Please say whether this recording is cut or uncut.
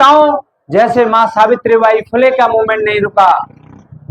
uncut